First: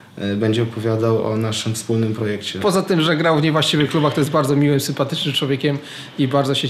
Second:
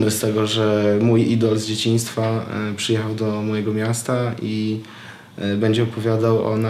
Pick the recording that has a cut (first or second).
first